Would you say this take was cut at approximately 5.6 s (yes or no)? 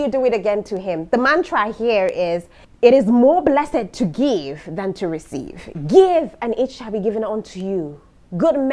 no